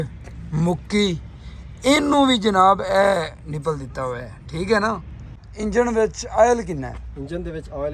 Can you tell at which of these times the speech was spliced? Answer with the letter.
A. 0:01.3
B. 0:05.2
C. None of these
B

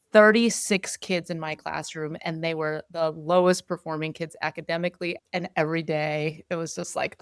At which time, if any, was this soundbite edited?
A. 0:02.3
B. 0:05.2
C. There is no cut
B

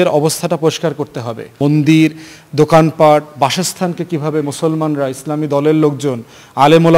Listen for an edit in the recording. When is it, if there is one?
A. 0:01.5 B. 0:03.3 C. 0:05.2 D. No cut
A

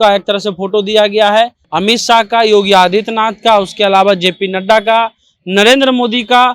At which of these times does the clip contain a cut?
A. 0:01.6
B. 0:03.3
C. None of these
A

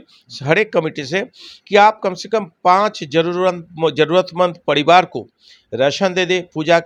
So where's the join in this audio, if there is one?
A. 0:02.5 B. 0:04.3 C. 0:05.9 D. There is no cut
D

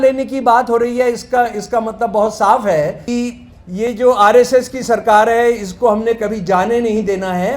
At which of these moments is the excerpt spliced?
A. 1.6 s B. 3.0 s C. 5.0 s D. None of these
B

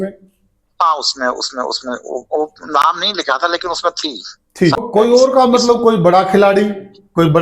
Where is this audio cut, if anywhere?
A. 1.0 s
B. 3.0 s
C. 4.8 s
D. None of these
C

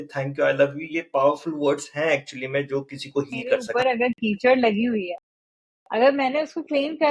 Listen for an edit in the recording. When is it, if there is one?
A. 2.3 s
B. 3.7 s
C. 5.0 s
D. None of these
B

